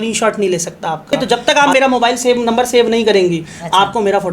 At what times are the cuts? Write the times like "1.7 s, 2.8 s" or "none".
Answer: 1.2 s